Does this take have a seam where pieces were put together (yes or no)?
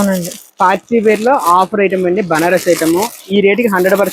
no